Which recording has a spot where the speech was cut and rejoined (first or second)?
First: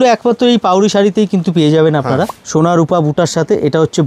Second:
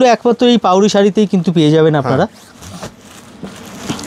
first